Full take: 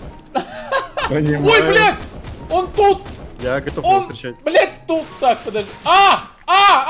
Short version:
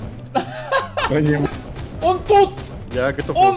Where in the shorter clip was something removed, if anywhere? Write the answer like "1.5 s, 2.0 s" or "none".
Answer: 1.4 s